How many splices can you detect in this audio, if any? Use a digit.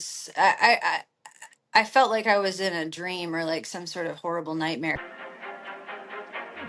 1